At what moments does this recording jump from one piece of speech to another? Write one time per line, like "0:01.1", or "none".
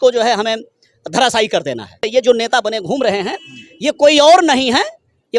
0:02.0